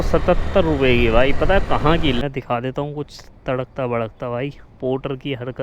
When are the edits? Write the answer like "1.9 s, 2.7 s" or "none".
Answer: 2.2 s